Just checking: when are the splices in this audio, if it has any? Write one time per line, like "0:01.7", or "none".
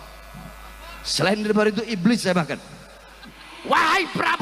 0:03.5